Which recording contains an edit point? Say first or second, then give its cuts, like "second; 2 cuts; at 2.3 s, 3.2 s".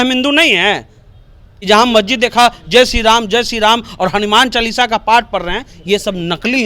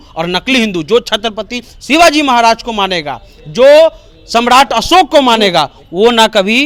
first; 1 cut; at 1.5 s